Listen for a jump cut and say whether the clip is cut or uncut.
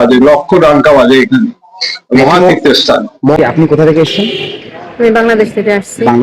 cut